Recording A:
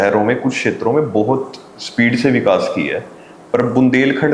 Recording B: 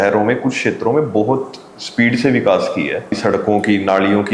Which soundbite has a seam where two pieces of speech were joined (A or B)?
B